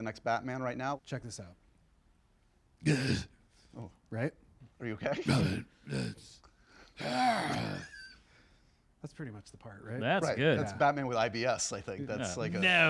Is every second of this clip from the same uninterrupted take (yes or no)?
no